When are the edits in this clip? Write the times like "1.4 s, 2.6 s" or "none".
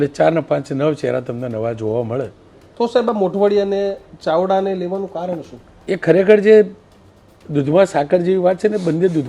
2.6 s, 5.7 s

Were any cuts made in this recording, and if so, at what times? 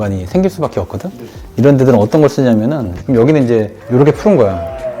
2.9 s

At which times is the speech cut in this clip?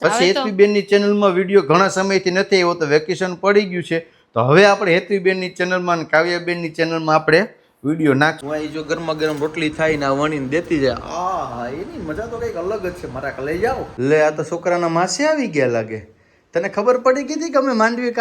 8.4 s

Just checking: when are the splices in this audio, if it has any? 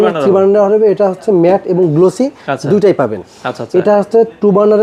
none

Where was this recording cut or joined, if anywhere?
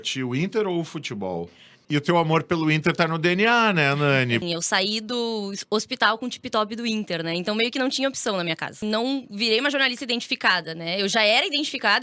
1.7 s, 4.4 s, 8.8 s

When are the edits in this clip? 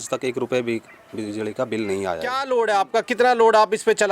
2.4 s

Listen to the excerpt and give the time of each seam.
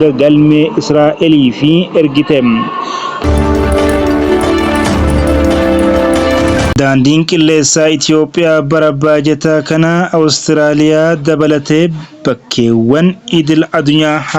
3.1 s, 6.7 s

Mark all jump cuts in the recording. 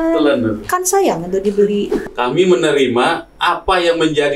2.0 s

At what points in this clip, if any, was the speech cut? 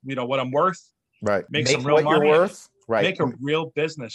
1.5 s

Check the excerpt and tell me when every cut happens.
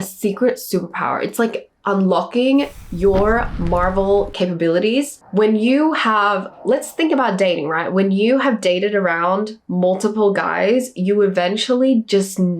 5.2 s

